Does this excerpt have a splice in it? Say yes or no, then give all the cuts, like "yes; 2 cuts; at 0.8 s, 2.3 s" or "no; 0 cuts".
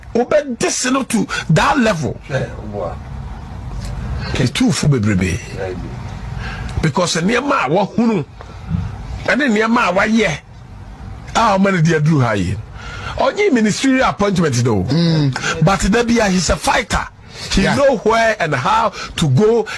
no; 0 cuts